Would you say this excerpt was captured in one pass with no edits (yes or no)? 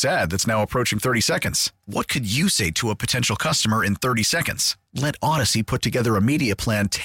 yes